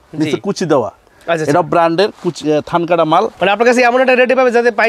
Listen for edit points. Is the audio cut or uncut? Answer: cut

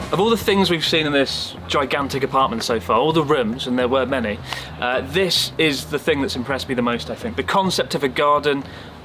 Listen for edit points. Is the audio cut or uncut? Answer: uncut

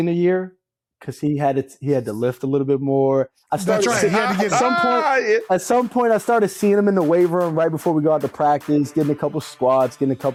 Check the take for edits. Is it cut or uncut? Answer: uncut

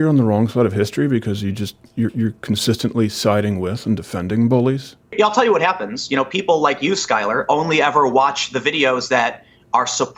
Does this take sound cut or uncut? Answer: cut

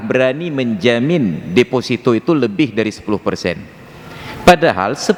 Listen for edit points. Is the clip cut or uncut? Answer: uncut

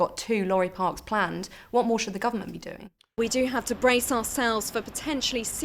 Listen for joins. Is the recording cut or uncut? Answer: cut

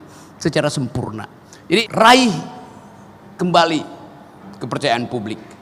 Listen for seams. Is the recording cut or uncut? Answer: cut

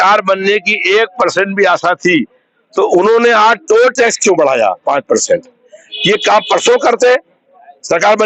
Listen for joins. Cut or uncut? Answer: uncut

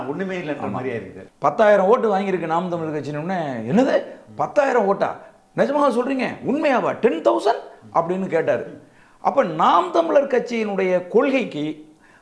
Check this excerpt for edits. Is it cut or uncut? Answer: cut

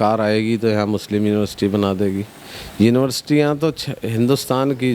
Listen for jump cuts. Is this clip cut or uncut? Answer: uncut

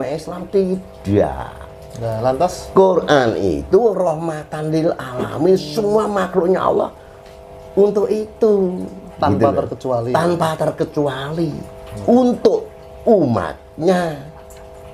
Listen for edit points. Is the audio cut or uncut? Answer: uncut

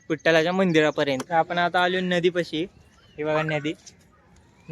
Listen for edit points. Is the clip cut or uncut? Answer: cut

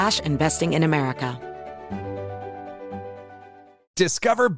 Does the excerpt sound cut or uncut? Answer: cut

